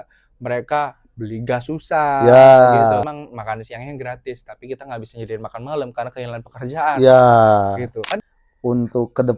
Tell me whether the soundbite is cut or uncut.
cut